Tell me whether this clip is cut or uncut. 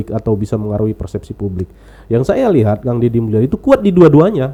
uncut